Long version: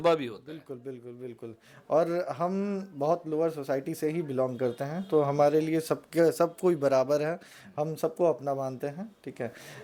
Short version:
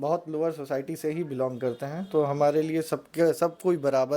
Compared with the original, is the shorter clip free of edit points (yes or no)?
yes